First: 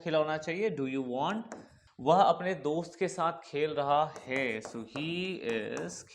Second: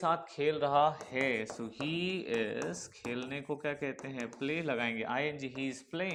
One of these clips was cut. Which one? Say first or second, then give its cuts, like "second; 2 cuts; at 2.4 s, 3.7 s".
first; 1 cut; at 2.0 s